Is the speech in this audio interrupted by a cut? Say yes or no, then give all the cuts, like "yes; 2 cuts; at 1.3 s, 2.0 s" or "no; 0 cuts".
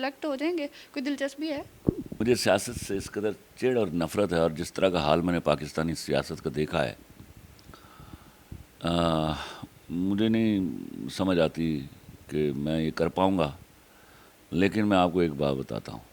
yes; 1 cut; at 2.2 s